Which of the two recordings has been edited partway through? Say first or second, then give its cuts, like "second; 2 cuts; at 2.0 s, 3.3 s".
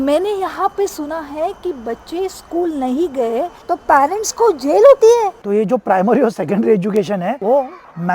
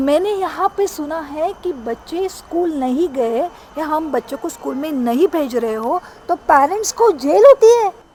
first; 2 cuts; at 3.5 s, 5.4 s